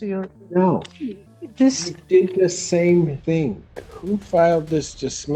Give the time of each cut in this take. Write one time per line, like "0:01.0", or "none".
0:03.6